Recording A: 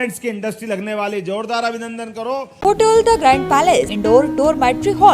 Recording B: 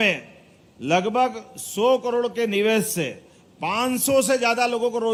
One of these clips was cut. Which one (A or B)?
A